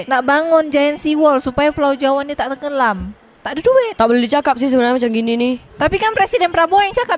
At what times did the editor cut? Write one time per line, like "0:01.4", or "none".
0:03.9